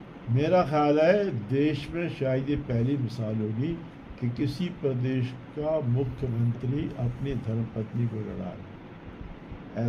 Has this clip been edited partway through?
no; 0 cuts

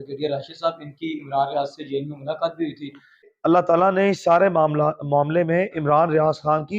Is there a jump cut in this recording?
yes; 1 cut; at 3.6 s

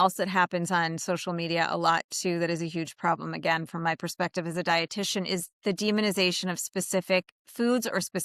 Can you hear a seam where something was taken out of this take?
no; 0 cuts

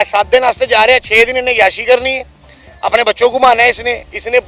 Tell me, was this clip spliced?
no; 0 cuts

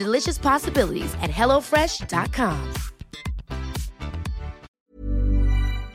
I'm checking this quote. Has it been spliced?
yes; 1 cut; at 4.7 s

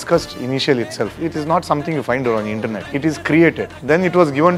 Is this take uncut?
no; 3 cuts; at 1.2 s, 2.9 s, 3.7 s

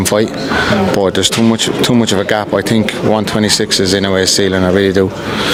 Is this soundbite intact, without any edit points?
yes; 0 cuts

